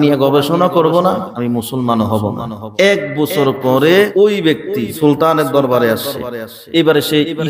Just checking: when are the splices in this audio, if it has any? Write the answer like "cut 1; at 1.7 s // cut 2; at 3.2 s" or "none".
cut 1; at 1.3 s // cut 2; at 2.6 s // cut 3; at 4.3 s